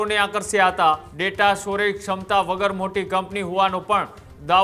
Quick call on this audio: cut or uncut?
cut